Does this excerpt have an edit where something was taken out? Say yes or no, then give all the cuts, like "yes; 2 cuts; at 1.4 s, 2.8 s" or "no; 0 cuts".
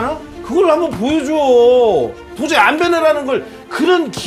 no; 0 cuts